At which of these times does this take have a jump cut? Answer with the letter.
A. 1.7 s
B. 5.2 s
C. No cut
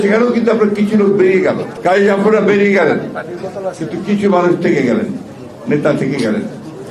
A